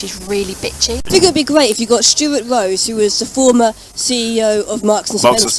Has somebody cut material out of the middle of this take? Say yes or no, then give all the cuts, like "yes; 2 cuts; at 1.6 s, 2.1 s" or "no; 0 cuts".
yes; 1 cut; at 1.1 s